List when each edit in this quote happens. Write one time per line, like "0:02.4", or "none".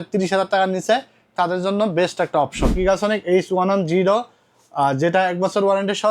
0:02.8